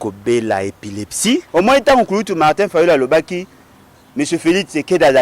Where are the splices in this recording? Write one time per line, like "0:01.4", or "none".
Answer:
0:01.5